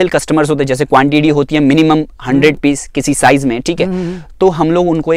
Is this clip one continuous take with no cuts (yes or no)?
yes